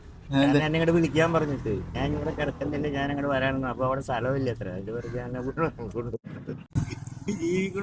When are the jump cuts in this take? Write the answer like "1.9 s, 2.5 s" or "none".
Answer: 6.6 s